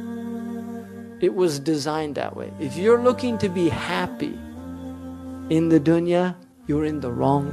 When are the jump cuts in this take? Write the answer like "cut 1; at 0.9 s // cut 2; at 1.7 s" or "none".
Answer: cut 1; at 6.5 s